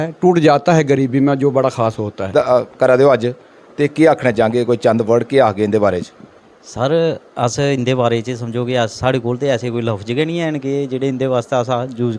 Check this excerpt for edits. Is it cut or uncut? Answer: cut